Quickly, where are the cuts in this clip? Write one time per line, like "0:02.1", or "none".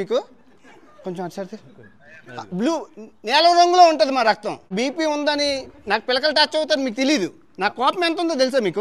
0:04.7

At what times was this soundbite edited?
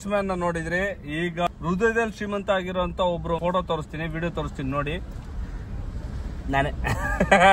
0:01.4
0:03.4

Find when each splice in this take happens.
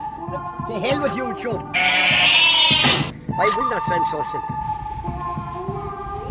none

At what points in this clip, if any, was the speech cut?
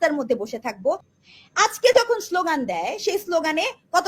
0:01.1

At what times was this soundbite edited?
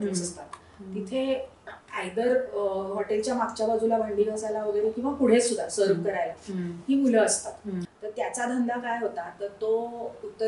0:07.9

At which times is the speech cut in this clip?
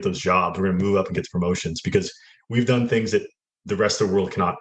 none

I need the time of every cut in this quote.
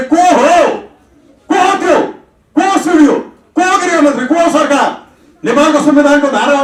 none

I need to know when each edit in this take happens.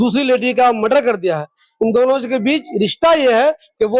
none

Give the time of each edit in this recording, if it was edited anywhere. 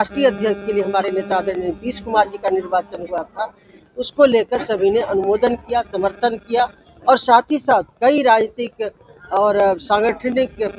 none

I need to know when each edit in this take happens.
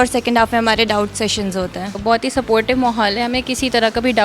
0:02.0

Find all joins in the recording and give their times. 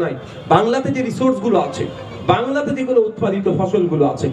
none

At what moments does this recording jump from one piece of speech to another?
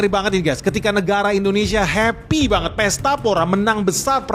none

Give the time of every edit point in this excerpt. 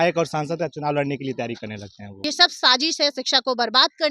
0:02.1

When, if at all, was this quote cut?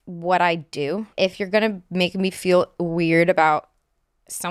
0:01.1

